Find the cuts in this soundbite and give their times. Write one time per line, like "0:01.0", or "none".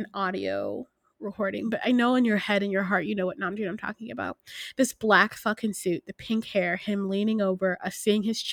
none